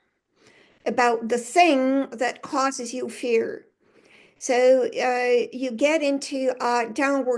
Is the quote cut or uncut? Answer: uncut